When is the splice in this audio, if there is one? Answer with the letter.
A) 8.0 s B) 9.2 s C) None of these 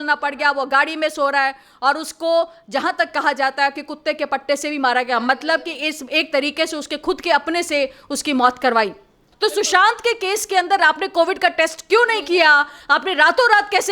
B